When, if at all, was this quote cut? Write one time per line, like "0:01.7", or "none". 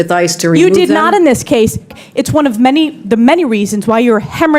0:01.9